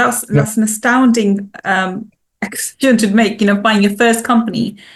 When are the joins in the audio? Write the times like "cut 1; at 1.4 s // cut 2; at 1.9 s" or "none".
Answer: none